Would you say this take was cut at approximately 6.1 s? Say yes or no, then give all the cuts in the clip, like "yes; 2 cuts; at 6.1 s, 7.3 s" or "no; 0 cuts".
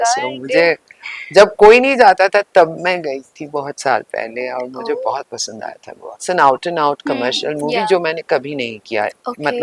yes; 1 cut; at 6.1 s